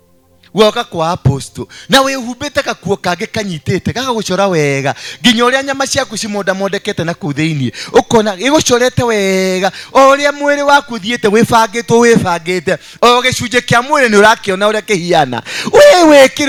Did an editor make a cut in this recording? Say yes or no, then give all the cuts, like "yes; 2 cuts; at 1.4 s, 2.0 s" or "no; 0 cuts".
no; 0 cuts